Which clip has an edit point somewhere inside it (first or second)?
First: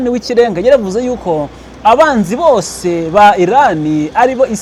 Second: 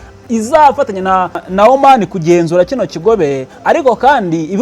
second